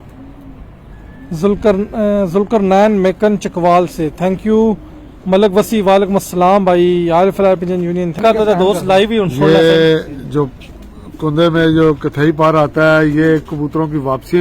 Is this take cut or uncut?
cut